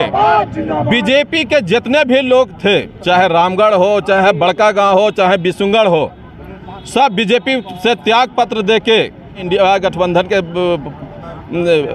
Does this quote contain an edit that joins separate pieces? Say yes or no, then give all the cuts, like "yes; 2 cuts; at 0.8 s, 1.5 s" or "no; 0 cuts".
yes; 1 cut; at 9.4 s